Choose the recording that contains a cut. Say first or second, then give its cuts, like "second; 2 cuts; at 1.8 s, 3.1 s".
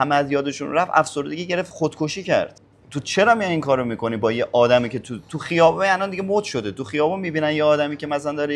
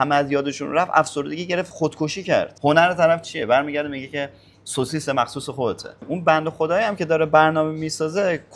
second; 2 cuts; at 2.5 s, 6.0 s